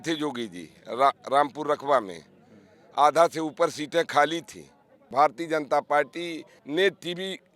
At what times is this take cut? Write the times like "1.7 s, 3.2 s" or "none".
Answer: 5.0 s, 6.5 s